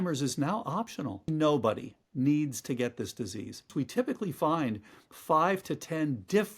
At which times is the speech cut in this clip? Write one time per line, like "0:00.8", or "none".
0:01.3
0:03.7

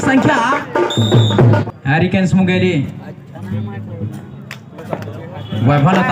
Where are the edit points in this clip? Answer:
0:01.6

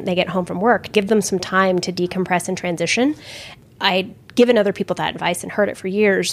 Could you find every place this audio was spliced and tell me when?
0:00.9

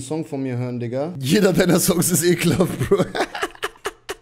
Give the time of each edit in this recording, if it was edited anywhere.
0:01.2

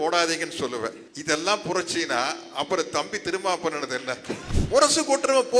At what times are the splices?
0:01.1
0:04.5

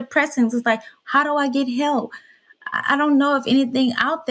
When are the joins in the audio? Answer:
0:00.9

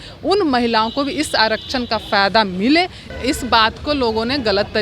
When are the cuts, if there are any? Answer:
0:03.1

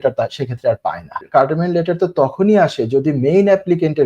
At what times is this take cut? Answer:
0:01.2

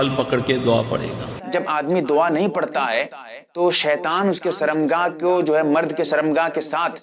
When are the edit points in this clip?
0:01.4

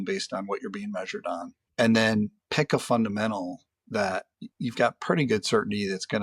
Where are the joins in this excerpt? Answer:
0:01.6
0:02.4
0:04.4

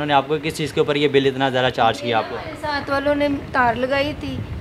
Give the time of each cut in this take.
none

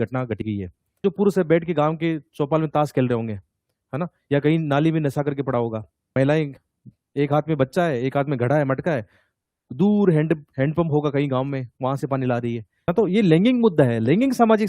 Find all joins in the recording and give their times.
0:01.0
0:06.0
0:12.9

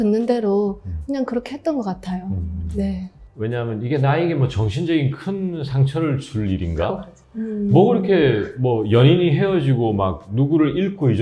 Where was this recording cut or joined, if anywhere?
0:03.1

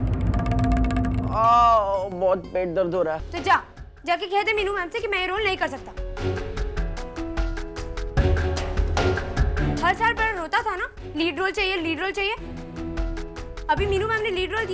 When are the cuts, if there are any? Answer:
0:03.3

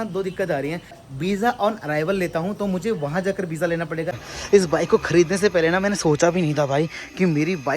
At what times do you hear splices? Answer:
0:01.0
0:04.2

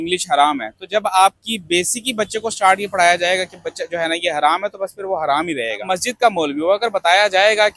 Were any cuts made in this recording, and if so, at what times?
0:05.8

